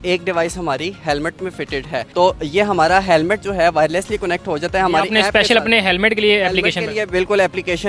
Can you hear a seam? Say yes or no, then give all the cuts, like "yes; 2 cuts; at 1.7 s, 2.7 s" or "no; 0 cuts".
no; 0 cuts